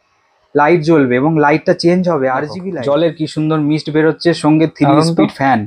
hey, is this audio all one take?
no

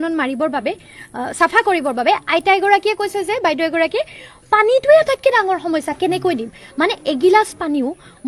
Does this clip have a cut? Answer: no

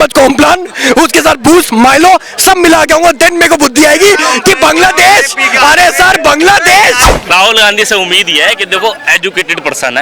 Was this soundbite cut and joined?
yes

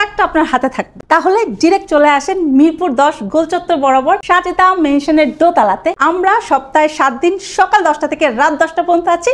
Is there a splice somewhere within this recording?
no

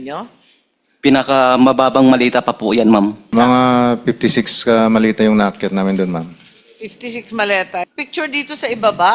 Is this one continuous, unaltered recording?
no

